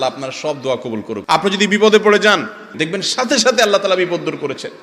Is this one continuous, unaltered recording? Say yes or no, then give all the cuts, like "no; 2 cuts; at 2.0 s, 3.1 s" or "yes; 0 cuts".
no; 2 cuts; at 1.2 s, 2.8 s